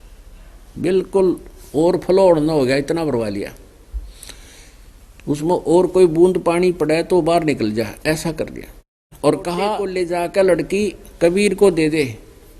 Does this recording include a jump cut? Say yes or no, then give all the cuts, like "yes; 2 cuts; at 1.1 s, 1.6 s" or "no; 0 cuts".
yes; 1 cut; at 9.8 s